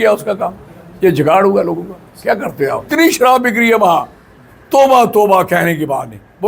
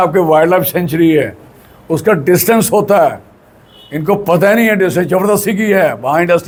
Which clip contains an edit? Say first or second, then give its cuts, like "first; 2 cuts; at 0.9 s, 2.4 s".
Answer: first; 1 cut; at 2.9 s